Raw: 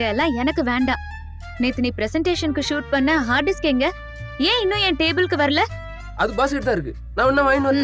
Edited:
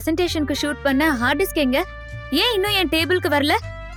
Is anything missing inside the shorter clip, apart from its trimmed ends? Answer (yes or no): no